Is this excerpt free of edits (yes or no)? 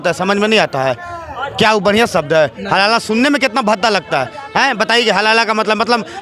yes